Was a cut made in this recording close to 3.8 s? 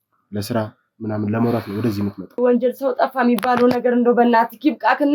no; 1 cut; at 2.4 s

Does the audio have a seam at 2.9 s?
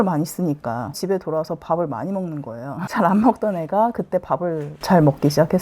yes; 2 cuts; at 1.0 s, 2.9 s

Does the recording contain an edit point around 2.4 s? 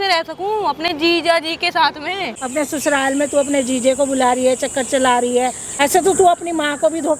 yes; 2 cuts; at 2.4 s, 5.6 s

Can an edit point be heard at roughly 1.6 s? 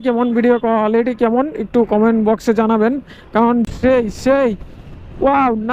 no; 1 cut; at 3.6 s

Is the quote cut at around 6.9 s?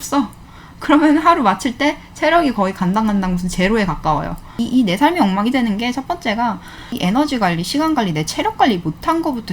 yes; 2 cuts; at 4.6 s, 6.9 s

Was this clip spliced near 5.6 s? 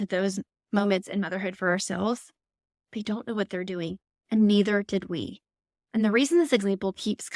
no; 0 cuts

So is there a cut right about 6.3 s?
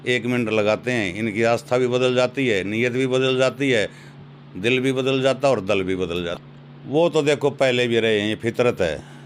yes; 1 cut; at 6.3 s

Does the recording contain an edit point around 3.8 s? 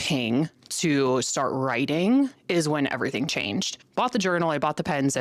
yes; 1 cut; at 3.8 s

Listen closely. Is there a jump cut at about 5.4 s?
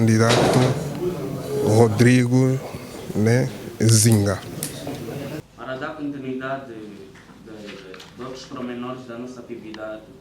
yes; 1 cut; at 5.4 s

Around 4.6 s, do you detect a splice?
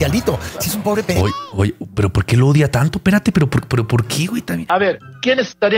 yes; 1 cut; at 4.6 s

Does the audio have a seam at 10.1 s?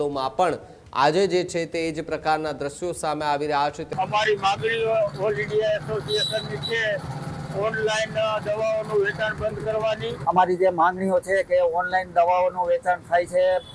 yes; 2 cuts; at 3.8 s, 10.1 s

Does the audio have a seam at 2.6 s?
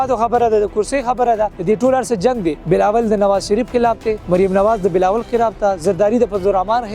yes; 3 cuts; at 1.6 s, 2.6 s, 4.2 s

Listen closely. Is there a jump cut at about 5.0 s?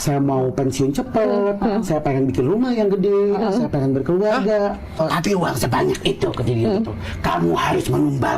yes; 1 cut; at 5.0 s

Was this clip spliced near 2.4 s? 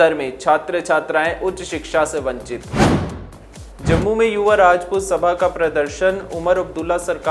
yes; 2 cuts; at 2.4 s, 3.7 s

